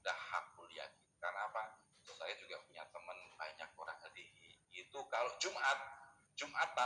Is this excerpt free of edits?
yes; 0 cuts

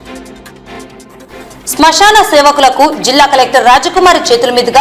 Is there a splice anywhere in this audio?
yes; 1 cut; at 1.3 s

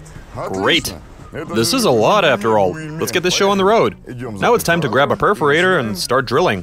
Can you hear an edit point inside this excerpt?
yes; 2 cuts; at 1.5 s, 4.3 s

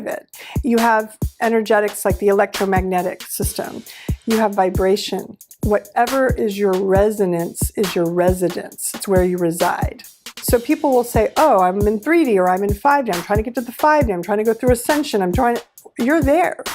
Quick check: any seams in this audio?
yes; 2 cuts; at 5.5 s, 10.3 s

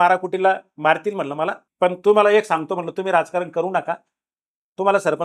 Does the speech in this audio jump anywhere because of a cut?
yes; 1 cut; at 1.6 s

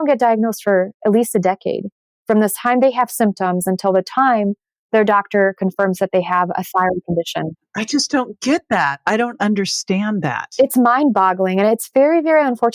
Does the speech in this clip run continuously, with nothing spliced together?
yes; 0 cuts

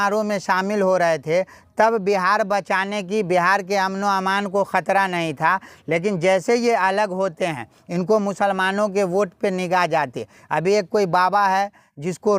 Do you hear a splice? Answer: no; 0 cuts

